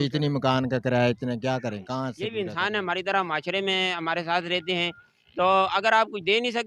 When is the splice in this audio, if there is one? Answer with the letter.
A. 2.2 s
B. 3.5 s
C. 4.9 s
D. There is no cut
A